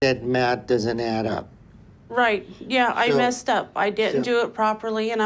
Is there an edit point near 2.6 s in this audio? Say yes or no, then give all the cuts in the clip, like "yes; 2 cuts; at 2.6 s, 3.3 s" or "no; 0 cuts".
no; 0 cuts